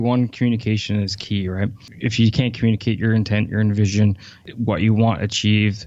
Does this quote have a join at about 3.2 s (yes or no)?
no